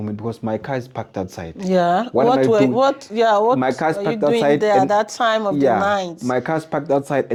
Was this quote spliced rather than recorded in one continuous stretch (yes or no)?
no